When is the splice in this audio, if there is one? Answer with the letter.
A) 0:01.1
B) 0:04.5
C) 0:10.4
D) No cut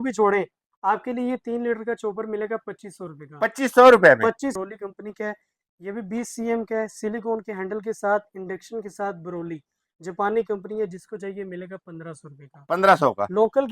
B